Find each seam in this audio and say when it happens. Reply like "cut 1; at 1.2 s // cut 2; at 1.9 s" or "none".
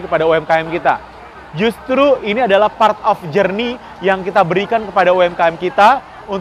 none